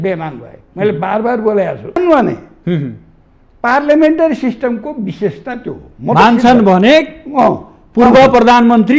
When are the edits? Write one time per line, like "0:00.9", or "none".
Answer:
0:02.0